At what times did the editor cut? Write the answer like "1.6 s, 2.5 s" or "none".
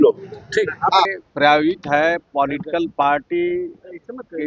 1.2 s